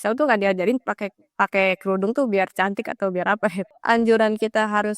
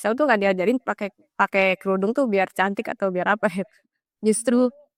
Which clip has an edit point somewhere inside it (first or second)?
first